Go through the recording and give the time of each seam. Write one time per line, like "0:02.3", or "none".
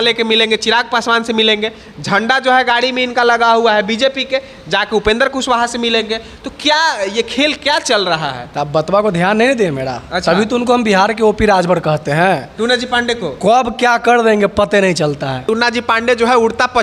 0:15.4